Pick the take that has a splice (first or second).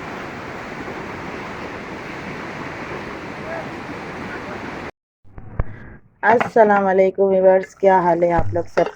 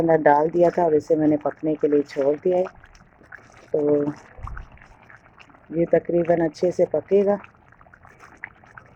first